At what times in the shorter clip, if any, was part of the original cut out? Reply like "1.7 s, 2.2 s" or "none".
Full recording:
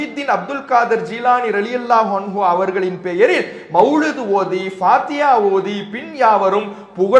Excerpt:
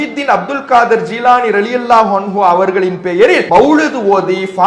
3.4 s